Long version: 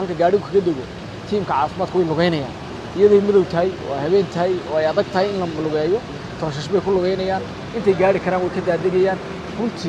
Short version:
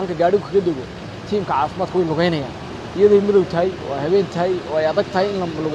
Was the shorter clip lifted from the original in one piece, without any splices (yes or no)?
yes